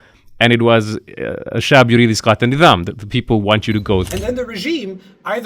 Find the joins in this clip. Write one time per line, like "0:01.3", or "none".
0:04.0